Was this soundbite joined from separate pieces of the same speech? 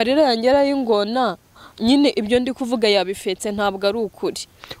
no; 0 cuts

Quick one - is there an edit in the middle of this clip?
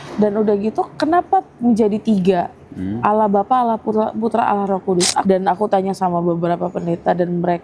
yes; 1 cut; at 5.2 s

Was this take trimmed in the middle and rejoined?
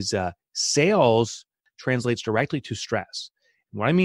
yes; 1 cut; at 1.7 s

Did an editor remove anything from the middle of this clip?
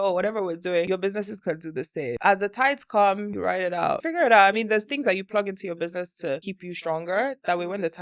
yes; 4 cuts; at 0.9 s, 2.2 s, 3.9 s, 6.5 s

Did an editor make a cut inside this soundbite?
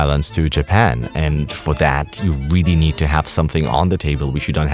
no; 0 cuts

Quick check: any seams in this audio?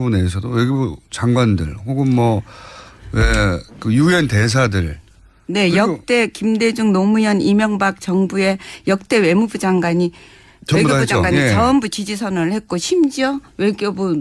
yes; 1 cut; at 8.6 s

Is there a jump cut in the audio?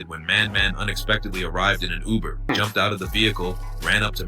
yes; 1 cut; at 2.5 s

